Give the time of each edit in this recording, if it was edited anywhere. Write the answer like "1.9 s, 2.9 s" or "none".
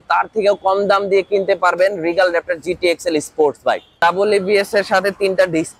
3.9 s